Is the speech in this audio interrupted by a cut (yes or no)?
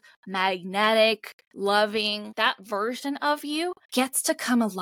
yes